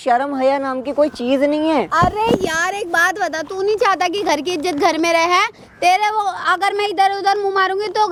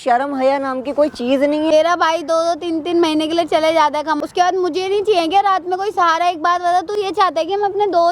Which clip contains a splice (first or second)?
second